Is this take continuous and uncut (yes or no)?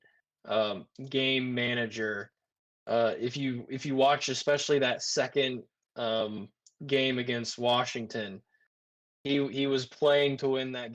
yes